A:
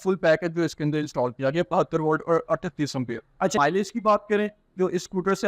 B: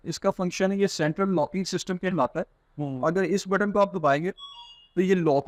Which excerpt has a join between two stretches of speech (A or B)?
A